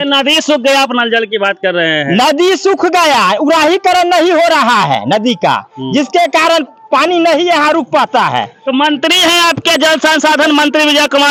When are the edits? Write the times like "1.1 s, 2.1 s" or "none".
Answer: none